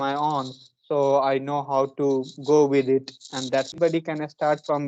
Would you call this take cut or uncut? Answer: cut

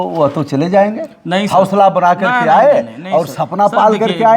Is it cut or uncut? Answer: uncut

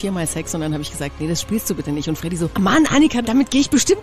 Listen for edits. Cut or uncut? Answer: cut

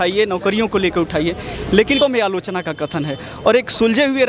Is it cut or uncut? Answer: cut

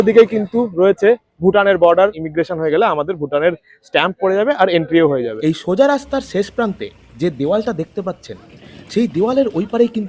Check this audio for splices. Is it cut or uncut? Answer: cut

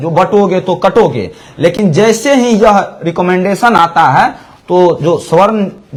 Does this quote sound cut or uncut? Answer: uncut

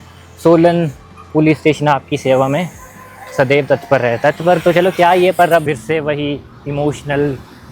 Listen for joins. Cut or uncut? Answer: cut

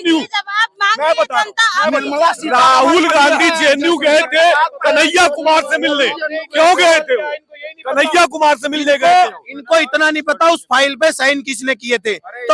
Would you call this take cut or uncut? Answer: uncut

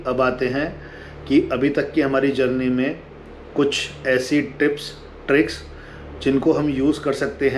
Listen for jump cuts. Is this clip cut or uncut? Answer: uncut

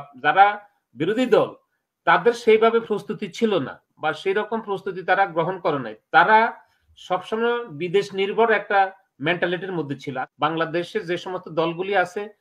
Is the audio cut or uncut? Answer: cut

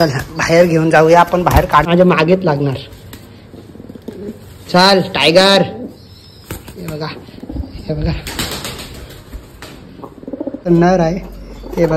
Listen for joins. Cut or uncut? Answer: cut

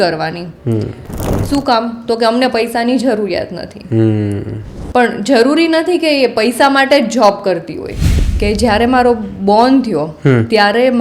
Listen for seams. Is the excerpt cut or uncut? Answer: cut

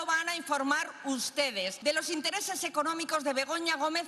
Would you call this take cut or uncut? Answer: cut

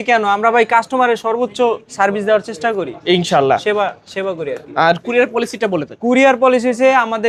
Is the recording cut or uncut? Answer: uncut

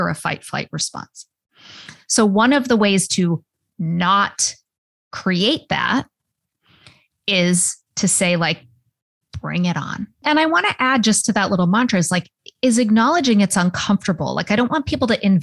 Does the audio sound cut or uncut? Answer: cut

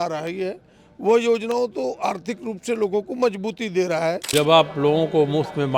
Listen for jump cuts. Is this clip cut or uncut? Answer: cut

